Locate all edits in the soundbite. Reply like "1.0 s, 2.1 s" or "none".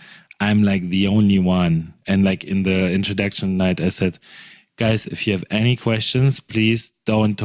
none